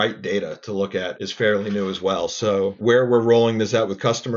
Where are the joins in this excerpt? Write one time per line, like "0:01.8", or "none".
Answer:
0:01.2
0:02.8